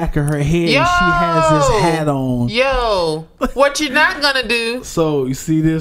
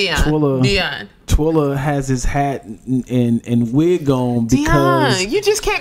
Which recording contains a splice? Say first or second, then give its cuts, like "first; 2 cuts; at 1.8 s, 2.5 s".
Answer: first; 1 cut; at 3.3 s